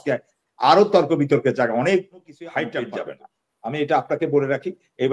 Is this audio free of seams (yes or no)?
no